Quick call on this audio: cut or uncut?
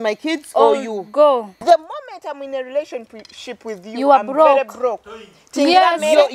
cut